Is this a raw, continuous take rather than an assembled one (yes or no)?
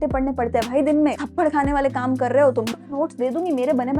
no